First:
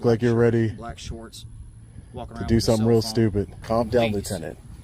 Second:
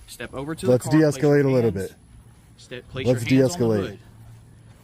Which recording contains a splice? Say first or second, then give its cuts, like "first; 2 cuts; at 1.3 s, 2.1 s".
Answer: first; 1 cut; at 3.6 s